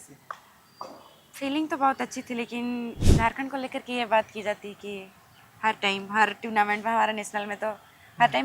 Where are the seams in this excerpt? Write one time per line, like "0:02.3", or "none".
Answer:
0:03.0